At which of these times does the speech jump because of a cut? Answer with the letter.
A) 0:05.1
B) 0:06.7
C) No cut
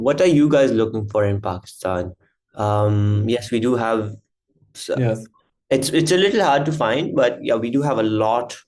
C